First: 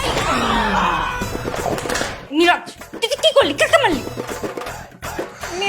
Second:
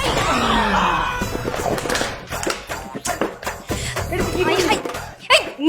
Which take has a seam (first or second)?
first